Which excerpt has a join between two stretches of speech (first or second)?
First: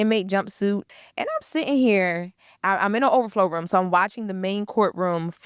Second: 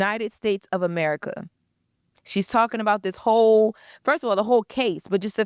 first